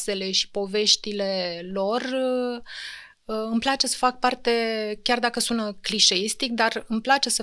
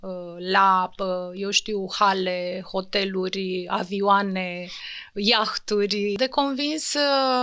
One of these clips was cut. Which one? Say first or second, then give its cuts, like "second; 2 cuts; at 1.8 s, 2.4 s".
second; 1 cut; at 6.2 s